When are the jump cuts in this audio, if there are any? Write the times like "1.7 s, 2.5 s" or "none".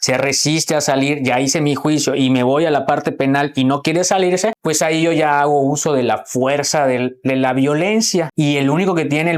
4.6 s, 8.3 s